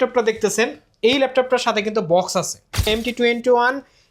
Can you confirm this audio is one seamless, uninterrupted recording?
no; 1 cut; at 2.9 s

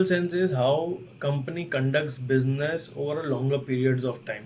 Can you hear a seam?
no; 0 cuts

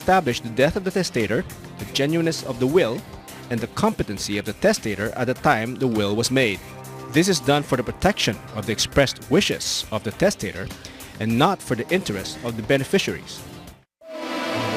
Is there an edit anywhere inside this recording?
no; 0 cuts

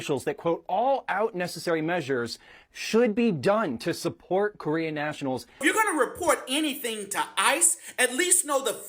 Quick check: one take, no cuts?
no; 1 cut; at 5.6 s

